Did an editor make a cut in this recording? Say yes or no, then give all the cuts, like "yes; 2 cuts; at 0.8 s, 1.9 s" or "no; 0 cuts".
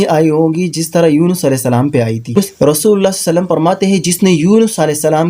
yes; 1 cut; at 2.5 s